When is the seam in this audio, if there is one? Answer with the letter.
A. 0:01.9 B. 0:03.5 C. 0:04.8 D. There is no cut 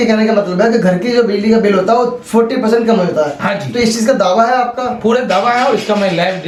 D